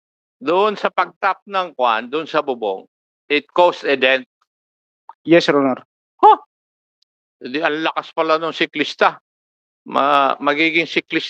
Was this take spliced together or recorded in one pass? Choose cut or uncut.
uncut